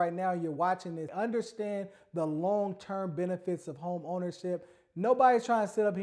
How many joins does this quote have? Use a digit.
1